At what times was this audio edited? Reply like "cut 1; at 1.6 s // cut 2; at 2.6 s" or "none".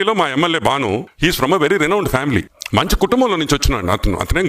cut 1; at 1.1 s // cut 2; at 2.6 s